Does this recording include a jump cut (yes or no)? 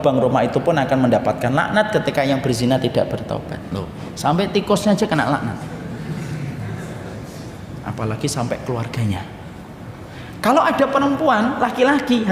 no